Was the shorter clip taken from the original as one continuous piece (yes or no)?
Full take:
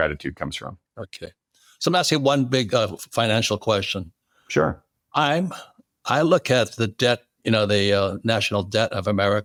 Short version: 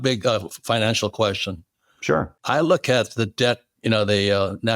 no